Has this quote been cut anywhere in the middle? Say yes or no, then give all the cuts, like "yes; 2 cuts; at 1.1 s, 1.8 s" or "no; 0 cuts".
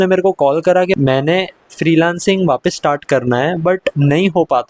yes; 2 cuts; at 1.0 s, 3.9 s